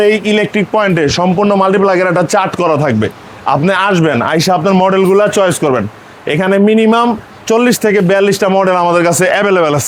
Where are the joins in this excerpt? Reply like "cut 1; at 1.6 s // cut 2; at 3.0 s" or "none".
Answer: none